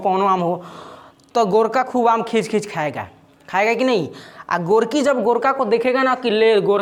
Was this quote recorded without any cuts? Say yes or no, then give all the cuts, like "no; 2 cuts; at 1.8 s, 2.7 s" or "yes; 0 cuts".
yes; 0 cuts